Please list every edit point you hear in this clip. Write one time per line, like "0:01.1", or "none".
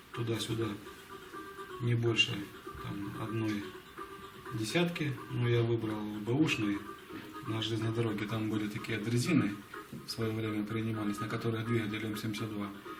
0:02.3